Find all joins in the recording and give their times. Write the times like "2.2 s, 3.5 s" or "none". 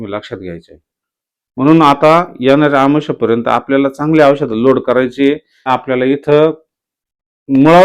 5.7 s